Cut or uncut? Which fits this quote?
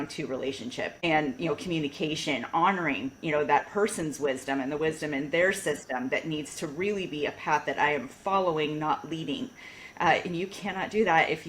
cut